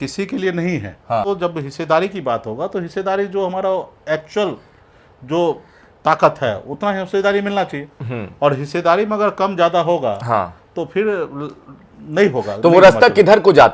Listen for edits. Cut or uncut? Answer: cut